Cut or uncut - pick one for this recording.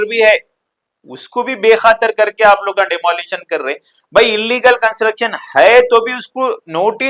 uncut